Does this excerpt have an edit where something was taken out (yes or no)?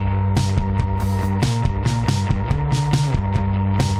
no